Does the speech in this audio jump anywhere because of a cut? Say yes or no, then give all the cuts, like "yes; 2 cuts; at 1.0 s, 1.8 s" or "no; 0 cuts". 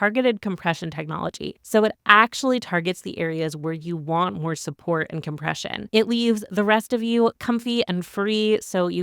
yes; 1 cut; at 5.8 s